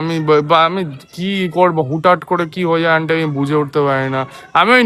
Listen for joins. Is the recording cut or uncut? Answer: uncut